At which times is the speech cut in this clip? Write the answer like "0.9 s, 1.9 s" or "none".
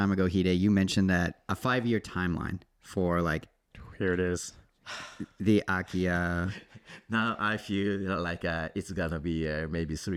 none